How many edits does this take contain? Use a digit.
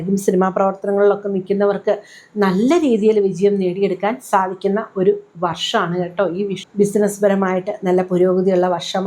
1